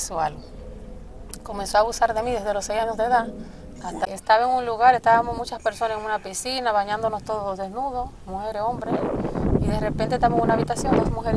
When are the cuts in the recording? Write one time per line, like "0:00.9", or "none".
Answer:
0:04.1